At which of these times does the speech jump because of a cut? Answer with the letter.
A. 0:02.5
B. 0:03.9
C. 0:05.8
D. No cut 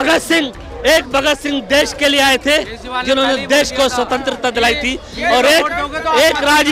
D